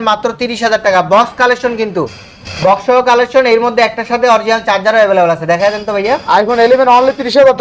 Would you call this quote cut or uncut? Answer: uncut